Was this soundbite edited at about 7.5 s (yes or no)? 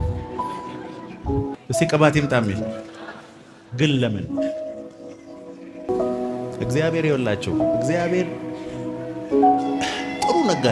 no